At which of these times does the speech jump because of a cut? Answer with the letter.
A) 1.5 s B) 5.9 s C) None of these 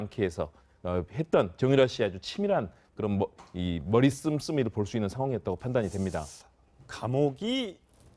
C